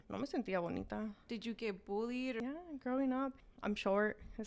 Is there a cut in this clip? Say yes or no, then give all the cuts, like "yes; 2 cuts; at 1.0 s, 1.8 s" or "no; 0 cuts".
yes; 3 cuts; at 1.2 s, 2.4 s, 3.5 s